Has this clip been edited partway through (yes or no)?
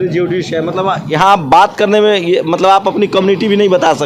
no